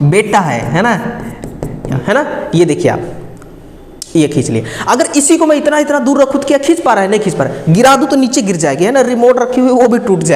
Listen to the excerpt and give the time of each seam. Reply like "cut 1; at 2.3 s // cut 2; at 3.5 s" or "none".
cut 1; at 2.0 s